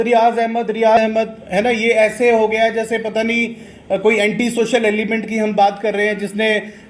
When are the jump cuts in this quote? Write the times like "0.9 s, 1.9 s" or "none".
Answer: 1.0 s